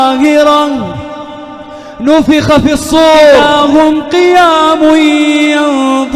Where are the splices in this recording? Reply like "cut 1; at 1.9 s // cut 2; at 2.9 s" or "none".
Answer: cut 1; at 3.4 s